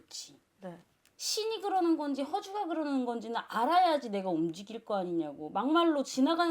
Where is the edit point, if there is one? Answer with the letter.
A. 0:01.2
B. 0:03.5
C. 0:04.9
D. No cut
A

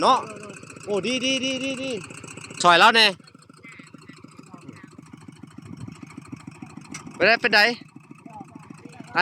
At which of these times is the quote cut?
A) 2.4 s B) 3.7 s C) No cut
A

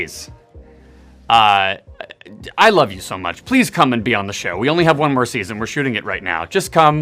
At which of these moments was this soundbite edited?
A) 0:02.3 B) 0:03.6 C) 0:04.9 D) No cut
D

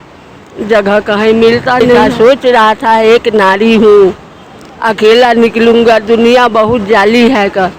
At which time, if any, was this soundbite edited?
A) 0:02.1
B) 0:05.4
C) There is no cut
A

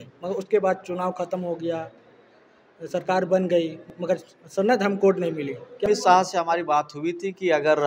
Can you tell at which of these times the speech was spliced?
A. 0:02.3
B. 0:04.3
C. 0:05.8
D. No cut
C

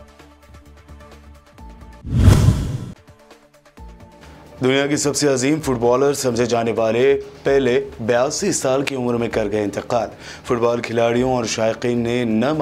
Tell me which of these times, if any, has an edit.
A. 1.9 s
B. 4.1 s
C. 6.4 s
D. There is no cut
A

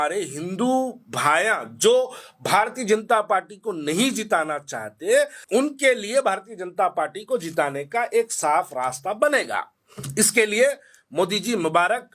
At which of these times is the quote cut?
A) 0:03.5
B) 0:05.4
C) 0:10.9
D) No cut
B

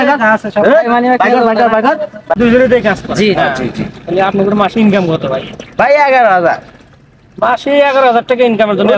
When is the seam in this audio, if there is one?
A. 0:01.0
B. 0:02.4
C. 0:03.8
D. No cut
B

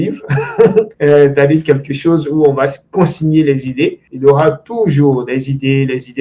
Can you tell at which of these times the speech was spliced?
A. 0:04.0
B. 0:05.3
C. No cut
A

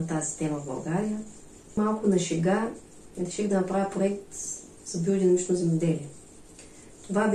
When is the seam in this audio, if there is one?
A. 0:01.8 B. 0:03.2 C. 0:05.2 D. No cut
A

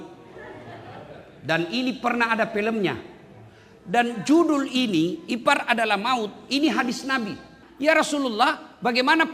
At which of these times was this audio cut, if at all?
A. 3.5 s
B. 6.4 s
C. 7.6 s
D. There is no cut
C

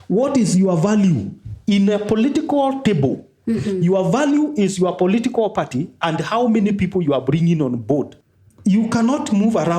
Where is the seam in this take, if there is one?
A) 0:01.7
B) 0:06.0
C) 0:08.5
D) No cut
C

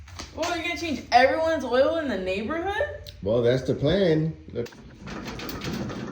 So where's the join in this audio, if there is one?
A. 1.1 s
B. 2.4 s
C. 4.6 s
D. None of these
C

